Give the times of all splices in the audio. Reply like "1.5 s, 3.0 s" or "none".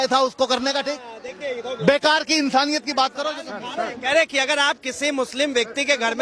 none